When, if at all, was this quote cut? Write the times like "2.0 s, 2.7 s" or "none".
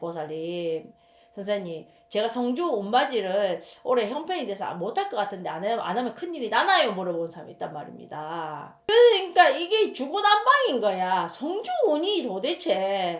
8.9 s